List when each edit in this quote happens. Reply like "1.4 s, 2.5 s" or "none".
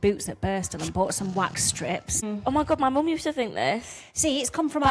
2.2 s